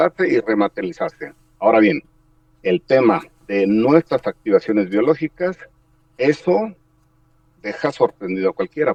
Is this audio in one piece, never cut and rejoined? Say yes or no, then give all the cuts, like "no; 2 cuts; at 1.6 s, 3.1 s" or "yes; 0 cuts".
yes; 0 cuts